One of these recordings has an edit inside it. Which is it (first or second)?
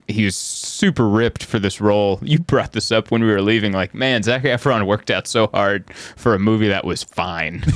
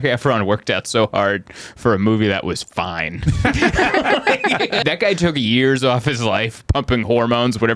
second